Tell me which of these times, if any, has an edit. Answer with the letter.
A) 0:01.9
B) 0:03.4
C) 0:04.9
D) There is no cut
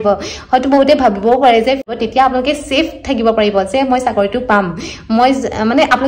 A